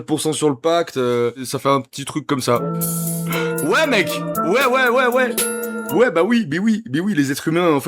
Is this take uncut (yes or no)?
no